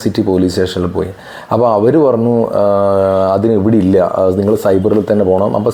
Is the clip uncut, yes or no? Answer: yes